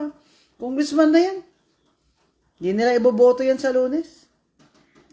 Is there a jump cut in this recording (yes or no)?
no